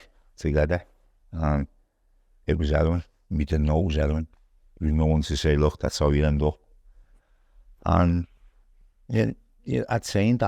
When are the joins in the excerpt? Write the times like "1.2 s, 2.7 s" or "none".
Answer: none